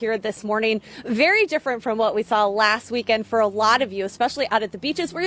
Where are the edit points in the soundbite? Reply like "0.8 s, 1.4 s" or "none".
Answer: none